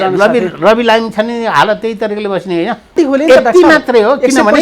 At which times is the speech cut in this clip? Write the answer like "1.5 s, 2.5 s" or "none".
2.9 s